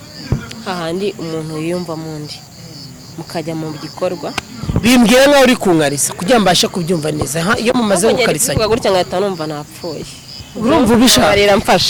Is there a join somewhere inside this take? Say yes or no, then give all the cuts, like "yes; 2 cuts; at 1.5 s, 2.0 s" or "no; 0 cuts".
no; 0 cuts